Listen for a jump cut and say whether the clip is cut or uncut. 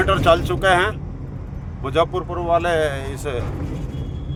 uncut